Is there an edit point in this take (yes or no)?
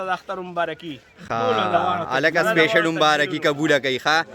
no